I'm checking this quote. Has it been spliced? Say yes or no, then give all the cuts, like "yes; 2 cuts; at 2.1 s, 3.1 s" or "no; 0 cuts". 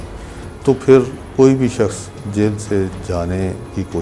no; 0 cuts